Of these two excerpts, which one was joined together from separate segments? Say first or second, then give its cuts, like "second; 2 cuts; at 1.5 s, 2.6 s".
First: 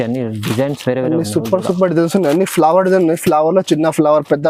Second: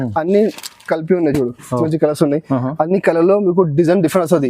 second; 1 cut; at 1.9 s